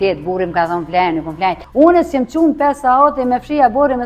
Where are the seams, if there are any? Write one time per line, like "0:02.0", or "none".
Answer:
0:01.6

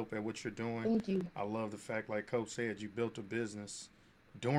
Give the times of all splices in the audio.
none

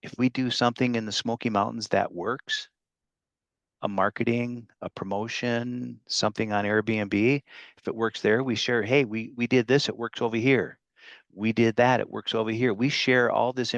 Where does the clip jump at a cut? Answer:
none

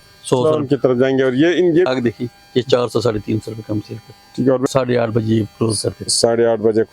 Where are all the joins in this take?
0:01.9
0:04.7

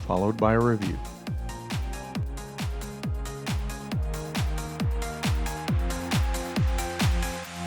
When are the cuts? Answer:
0:00.9

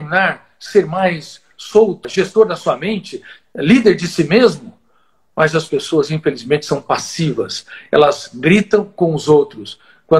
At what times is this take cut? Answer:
0:02.1

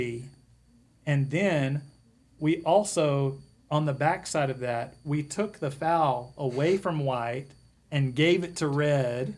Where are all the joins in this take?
none

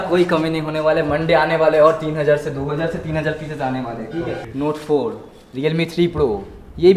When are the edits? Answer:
0:04.4

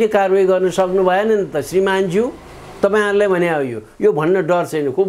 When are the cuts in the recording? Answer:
none

